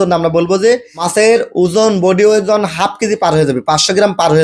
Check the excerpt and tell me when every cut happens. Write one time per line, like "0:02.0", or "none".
0:01.0